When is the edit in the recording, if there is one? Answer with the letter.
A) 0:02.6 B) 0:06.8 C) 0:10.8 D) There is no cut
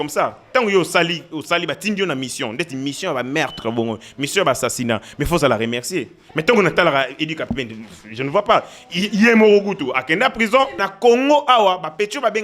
C